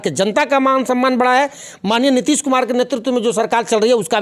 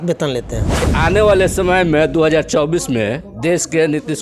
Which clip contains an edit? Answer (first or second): second